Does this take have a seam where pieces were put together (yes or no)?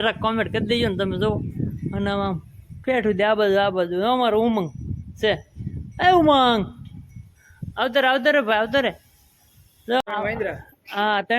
yes